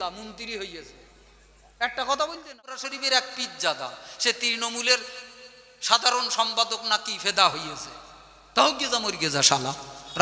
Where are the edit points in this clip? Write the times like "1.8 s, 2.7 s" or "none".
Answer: 2.9 s